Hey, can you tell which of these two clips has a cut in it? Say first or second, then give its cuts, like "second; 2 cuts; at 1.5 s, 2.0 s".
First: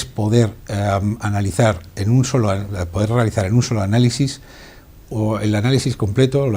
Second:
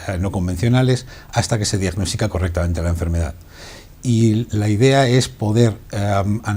second; 1 cut; at 2.5 s